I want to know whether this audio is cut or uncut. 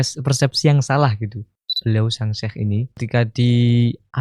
cut